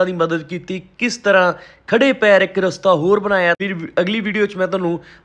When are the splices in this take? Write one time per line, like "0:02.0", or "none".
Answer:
0:03.6